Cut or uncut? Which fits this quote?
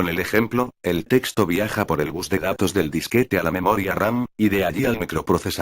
cut